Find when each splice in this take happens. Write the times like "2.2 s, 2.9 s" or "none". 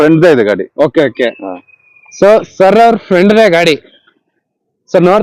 none